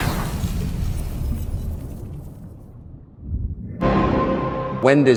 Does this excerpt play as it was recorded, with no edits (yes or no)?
yes